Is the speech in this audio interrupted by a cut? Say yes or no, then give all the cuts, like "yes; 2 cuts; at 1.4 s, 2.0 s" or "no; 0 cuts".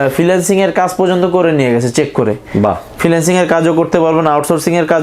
no; 0 cuts